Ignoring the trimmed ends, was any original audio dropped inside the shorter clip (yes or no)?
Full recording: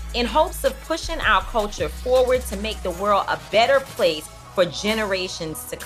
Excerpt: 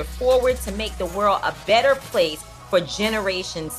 no